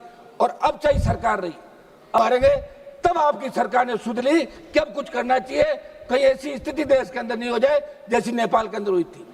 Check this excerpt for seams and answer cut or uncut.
cut